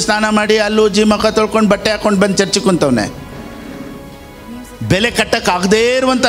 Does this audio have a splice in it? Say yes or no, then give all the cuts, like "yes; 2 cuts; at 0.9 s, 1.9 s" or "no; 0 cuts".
yes; 1 cut; at 4.6 s